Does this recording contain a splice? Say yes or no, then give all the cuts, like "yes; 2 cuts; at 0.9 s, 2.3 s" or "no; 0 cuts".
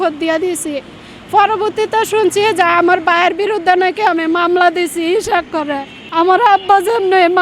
yes; 1 cut; at 5.9 s